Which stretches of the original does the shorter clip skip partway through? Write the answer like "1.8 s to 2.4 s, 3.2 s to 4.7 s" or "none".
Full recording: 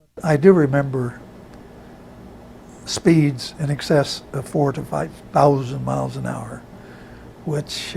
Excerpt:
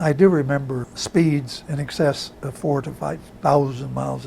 1.2 s to 2.9 s